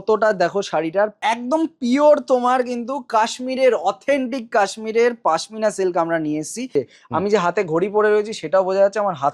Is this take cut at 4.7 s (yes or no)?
no